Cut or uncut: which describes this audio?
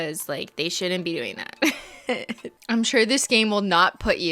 cut